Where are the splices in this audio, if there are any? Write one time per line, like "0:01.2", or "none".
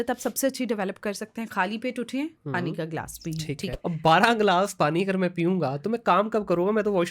0:03.7